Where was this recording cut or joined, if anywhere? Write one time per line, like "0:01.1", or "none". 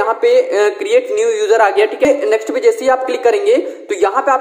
0:02.0